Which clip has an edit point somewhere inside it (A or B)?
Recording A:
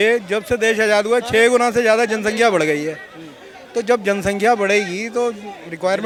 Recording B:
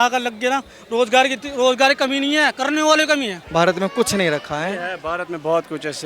B